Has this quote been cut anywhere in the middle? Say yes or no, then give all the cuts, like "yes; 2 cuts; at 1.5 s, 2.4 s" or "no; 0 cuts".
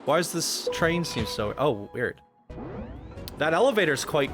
no; 0 cuts